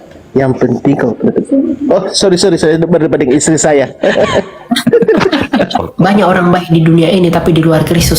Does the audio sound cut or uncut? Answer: cut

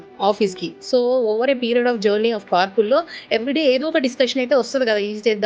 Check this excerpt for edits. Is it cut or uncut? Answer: uncut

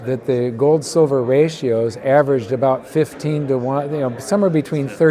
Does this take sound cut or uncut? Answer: uncut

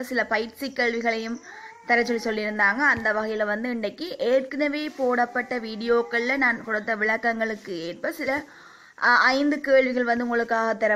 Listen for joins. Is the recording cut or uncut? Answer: uncut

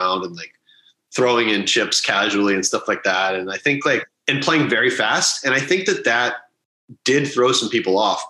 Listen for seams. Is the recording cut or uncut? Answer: cut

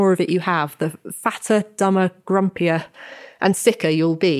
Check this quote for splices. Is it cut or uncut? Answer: uncut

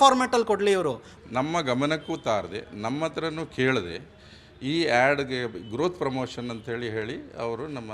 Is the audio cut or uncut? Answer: cut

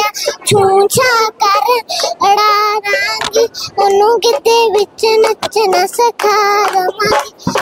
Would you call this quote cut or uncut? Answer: uncut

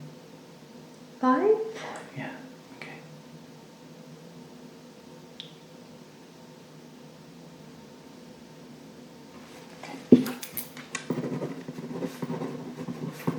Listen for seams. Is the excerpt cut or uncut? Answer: cut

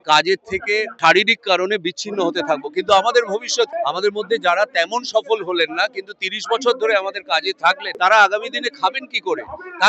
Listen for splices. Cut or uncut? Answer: cut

